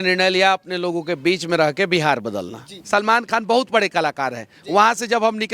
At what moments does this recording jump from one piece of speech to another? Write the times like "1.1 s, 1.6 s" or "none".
2.8 s